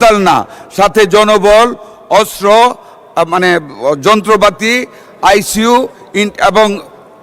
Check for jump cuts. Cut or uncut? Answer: uncut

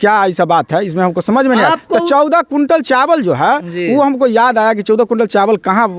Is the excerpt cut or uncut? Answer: uncut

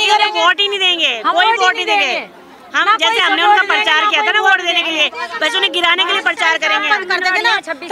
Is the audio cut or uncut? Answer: uncut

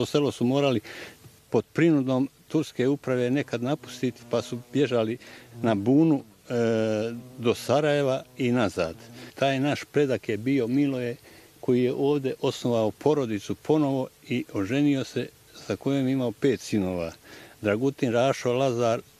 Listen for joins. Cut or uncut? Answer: cut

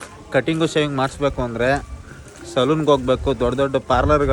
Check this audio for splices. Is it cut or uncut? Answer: uncut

